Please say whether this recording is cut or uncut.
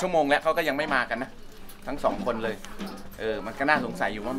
uncut